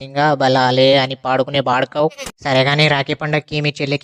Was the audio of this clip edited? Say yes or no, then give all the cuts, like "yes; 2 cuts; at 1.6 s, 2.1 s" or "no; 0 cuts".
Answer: yes; 1 cut; at 2.2 s